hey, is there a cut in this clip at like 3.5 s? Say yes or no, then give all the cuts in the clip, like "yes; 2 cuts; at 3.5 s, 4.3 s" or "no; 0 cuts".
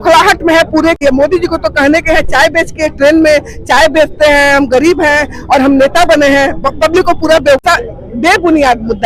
no; 2 cuts; at 1.0 s, 7.6 s